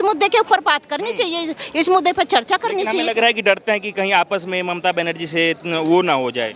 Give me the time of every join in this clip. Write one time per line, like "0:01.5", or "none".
none